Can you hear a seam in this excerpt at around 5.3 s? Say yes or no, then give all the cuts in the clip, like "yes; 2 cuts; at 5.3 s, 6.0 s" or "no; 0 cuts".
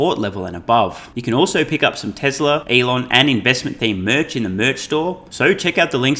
yes; 3 cuts; at 1.1 s, 2.6 s, 5.3 s